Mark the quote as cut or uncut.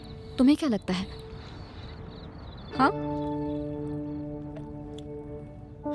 uncut